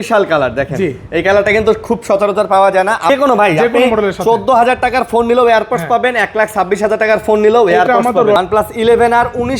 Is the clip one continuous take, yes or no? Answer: no